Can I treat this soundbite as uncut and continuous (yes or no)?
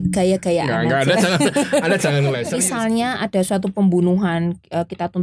no